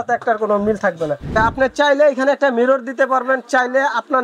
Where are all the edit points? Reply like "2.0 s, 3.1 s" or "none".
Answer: 1.3 s